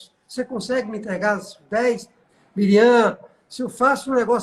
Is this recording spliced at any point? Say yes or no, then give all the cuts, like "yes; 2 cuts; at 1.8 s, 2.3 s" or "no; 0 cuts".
yes; 1 cut; at 2.2 s